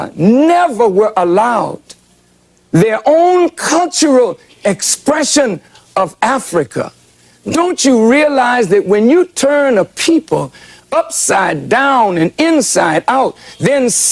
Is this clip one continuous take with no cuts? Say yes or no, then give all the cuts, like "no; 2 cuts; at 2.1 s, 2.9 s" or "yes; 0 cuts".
yes; 0 cuts